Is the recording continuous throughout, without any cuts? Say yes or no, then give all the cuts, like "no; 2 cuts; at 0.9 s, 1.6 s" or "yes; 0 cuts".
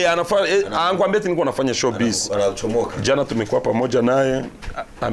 yes; 0 cuts